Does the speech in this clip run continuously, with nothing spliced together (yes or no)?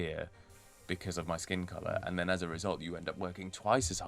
yes